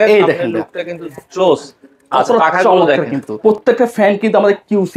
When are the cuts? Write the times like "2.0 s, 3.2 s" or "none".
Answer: 3.2 s